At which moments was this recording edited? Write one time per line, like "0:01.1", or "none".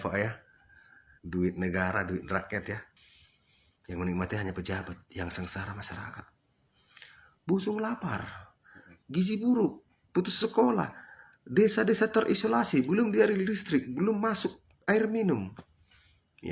0:02.9